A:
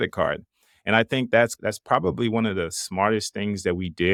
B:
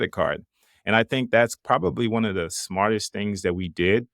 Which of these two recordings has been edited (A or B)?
B